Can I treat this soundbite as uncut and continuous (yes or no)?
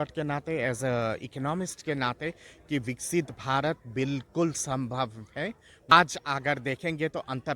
no